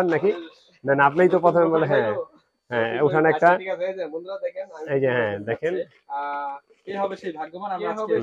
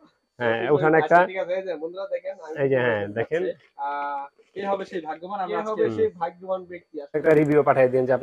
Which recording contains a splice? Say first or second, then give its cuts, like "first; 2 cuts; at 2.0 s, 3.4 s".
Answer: second; 1 cut; at 7.2 s